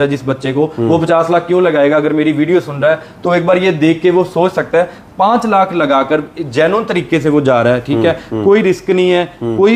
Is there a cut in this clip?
no; 0 cuts

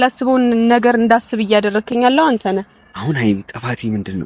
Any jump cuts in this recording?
no; 0 cuts

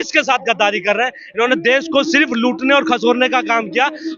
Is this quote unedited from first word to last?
yes; 0 cuts

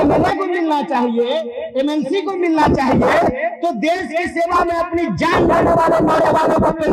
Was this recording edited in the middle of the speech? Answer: no; 0 cuts

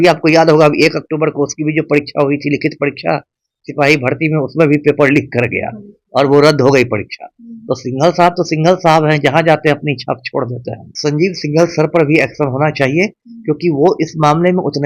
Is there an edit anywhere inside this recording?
yes; 1 cut; at 10.8 s

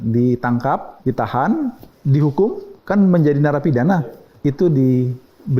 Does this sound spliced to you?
yes; 4 cuts; at 0.9 s, 1.9 s, 2.7 s, 4.2 s

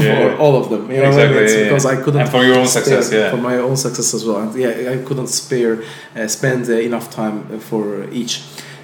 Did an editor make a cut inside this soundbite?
no; 0 cuts

